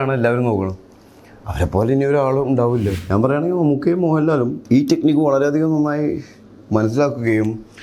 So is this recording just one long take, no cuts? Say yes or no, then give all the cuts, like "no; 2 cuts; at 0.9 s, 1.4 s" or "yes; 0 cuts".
no; 2 cuts; at 2.9 s, 4.6 s